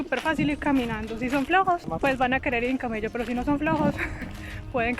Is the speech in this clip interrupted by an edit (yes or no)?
yes